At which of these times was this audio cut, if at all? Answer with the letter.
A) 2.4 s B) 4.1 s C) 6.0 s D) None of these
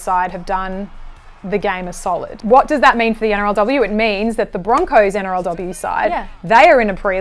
A